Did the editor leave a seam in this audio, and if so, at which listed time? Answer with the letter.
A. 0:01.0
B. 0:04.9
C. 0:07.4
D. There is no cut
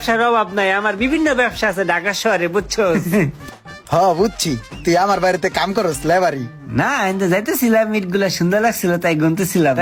D